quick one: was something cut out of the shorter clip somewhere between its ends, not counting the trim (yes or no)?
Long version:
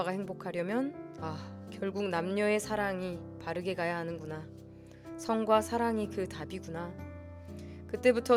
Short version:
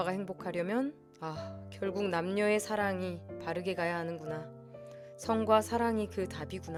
no